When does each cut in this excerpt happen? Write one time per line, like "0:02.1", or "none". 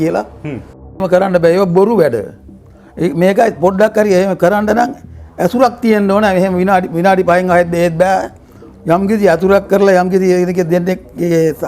0:01.0